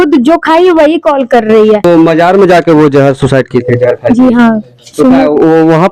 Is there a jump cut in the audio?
yes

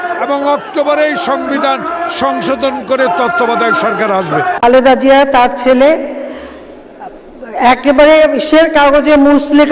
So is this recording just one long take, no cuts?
no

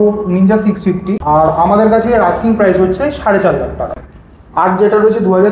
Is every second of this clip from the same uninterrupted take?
no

